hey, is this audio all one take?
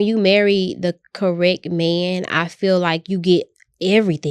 yes; 0 cuts

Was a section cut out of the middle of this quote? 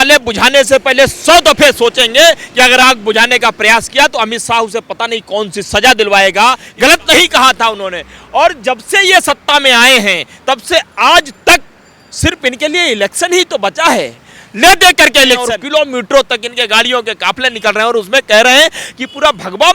yes; 2 cuts; at 6.6 s, 15.5 s

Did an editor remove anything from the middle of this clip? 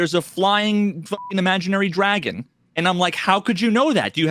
no; 0 cuts

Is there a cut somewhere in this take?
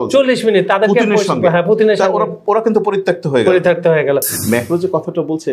yes; 1 cut; at 4.3 s

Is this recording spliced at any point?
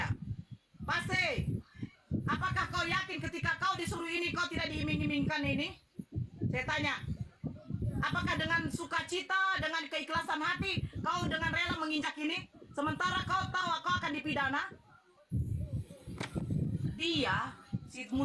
no; 0 cuts

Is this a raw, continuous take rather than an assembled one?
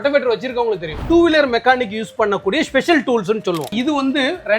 no; 2 cuts; at 1.0 s, 3.7 s

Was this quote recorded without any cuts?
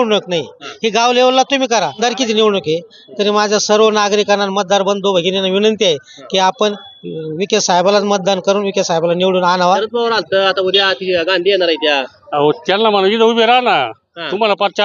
no; 2 cuts; at 2.0 s, 9.8 s

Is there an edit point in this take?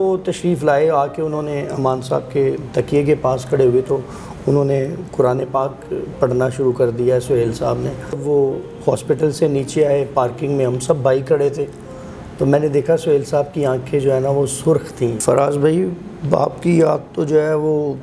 yes; 2 cuts; at 8.2 s, 15.2 s

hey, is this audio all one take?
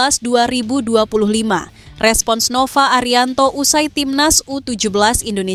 yes; 0 cuts

